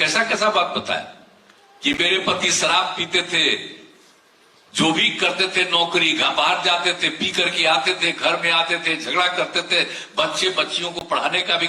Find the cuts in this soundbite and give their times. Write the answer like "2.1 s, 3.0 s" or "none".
none

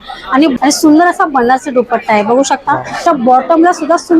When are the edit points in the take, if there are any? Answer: 3.0 s

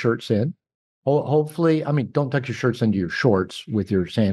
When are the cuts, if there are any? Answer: none

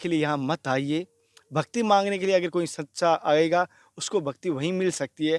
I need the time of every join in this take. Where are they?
none

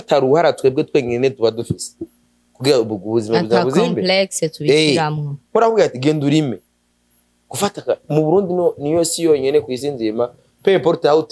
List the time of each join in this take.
none

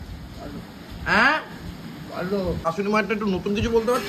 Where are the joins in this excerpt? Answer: 2.6 s

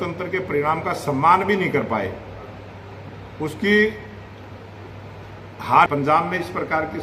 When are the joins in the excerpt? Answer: 5.9 s

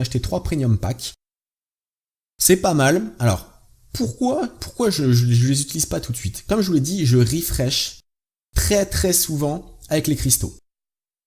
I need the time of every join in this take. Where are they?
10.2 s

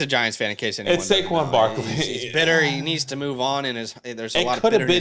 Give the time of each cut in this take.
none

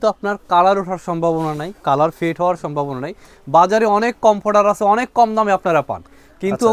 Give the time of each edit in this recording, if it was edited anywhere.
none

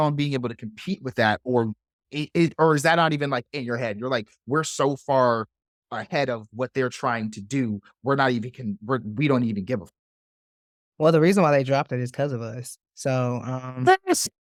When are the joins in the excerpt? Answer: none

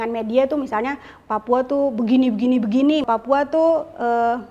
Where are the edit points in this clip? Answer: 3.0 s

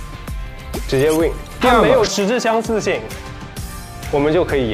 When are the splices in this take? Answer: 1.7 s

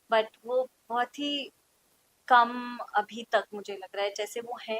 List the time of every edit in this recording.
none

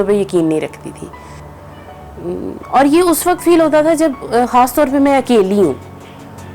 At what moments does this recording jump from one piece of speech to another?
1.5 s

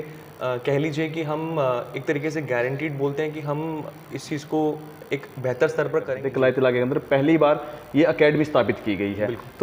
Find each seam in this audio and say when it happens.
6.1 s

